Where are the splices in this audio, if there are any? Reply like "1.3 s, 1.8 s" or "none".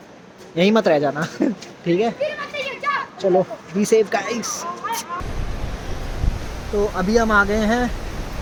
none